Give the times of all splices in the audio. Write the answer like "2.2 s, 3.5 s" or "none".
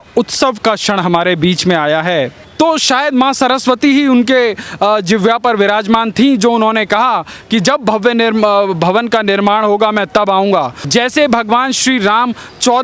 2.4 s, 10.8 s